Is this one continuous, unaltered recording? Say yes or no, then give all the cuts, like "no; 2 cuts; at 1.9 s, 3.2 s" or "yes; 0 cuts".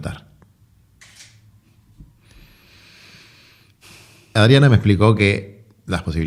yes; 0 cuts